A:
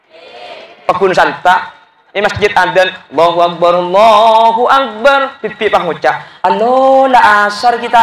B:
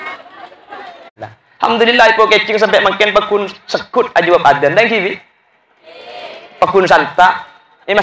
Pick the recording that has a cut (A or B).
B